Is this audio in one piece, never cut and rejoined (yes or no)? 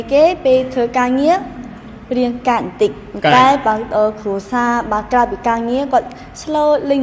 yes